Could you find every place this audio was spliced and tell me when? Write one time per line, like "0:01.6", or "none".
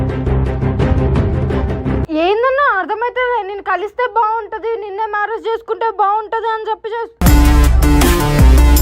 0:02.0